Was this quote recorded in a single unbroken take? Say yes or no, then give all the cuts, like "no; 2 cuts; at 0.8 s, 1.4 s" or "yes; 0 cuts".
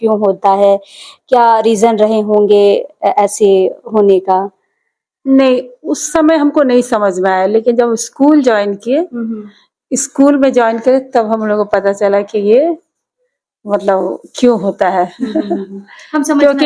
yes; 0 cuts